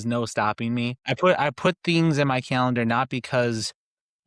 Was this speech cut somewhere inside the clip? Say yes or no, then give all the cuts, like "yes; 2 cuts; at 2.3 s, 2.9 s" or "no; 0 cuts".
yes; 1 cut; at 0.9 s